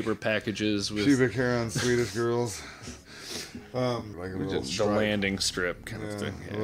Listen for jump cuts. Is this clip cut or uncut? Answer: cut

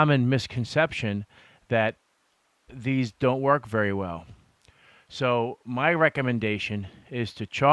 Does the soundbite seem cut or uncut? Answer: uncut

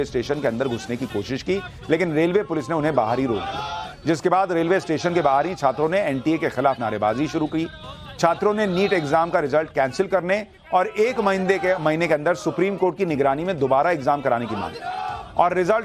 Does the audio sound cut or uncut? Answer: uncut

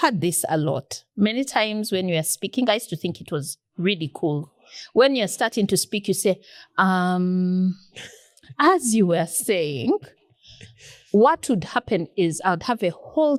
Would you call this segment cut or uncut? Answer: uncut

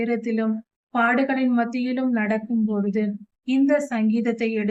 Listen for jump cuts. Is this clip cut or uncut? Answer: uncut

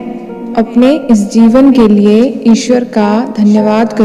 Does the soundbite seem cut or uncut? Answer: uncut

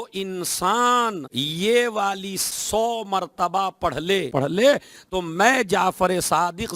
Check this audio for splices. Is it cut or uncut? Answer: cut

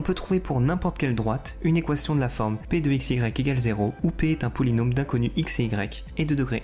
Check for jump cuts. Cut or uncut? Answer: uncut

